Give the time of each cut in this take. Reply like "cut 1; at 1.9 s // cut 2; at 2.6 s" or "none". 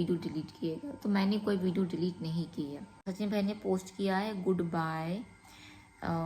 cut 1; at 2.9 s